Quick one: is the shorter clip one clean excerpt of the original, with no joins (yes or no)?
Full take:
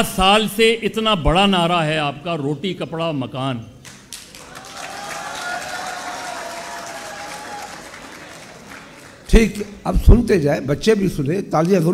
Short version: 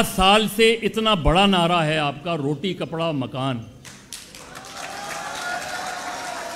yes